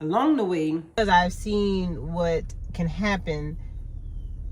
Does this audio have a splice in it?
yes; 1 cut; at 1.0 s

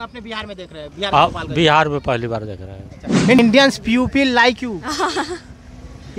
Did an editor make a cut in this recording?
yes; 1 cut; at 3.4 s

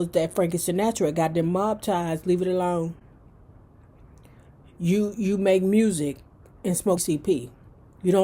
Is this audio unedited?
no; 1 cut; at 7.0 s

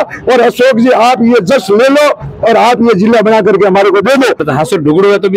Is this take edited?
yes; 1 cut; at 4.4 s

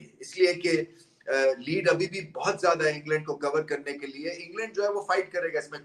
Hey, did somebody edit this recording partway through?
yes; 1 cut; at 3.0 s

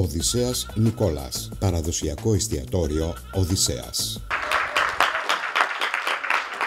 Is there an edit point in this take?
yes; 1 cut; at 4.3 s

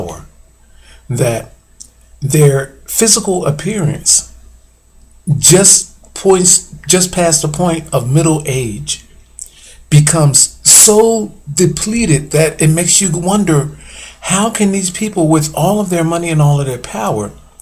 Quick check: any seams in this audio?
yes; 1 cut; at 13.2 s

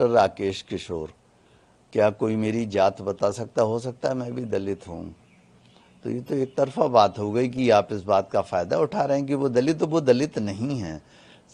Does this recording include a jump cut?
no; 0 cuts

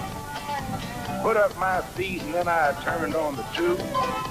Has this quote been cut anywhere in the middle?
yes; 1 cut; at 3.0 s

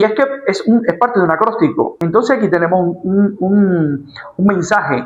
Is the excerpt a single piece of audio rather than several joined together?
no; 1 cut; at 2.0 s

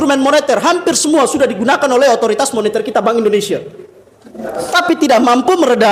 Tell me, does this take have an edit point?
no; 0 cuts

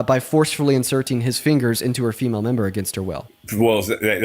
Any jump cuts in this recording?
yes; 1 cut; at 3.3 s

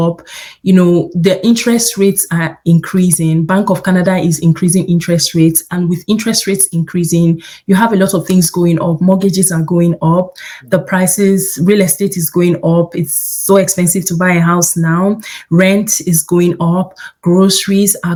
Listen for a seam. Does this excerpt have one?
no; 0 cuts

